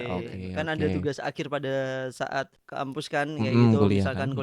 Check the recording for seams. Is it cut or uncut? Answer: cut